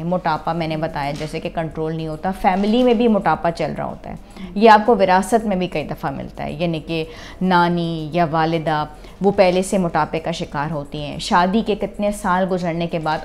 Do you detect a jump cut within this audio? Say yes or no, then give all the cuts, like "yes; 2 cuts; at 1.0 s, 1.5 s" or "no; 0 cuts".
no; 0 cuts